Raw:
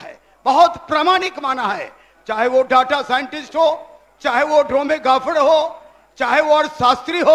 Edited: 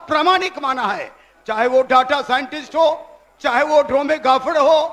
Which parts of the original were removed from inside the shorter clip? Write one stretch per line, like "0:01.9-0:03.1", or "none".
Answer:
none